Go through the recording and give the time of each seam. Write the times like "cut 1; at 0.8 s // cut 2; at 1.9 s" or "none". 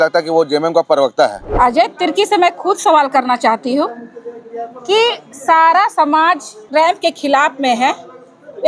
cut 1; at 1.4 s // cut 2; at 6.7 s

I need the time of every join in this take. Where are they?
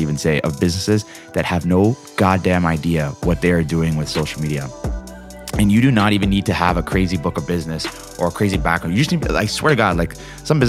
none

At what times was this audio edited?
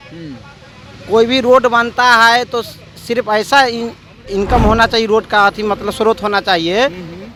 none

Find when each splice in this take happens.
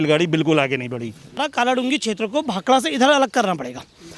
cut 1; at 1.5 s

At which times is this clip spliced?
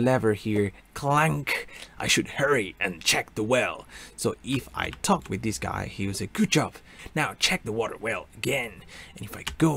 cut 1; at 7.0 s

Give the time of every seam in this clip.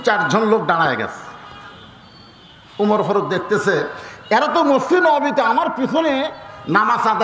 none

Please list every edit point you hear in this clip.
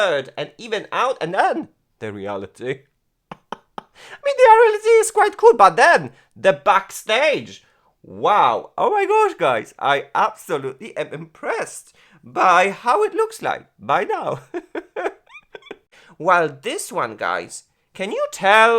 cut 1; at 16.0 s

